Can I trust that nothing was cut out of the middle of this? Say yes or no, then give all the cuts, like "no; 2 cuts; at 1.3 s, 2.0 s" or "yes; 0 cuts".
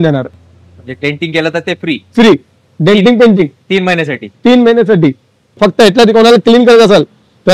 no; 1 cut; at 5.6 s